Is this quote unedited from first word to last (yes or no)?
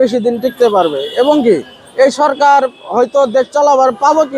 yes